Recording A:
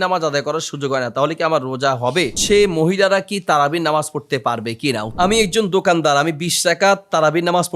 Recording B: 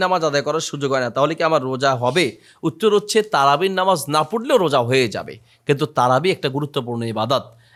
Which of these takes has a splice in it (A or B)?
A